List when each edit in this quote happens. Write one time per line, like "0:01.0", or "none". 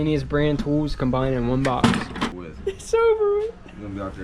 0:02.2